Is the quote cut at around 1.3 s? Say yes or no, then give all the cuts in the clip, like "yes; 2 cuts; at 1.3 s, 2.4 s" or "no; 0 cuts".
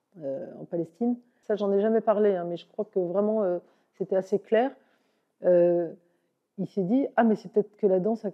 yes; 1 cut; at 1.3 s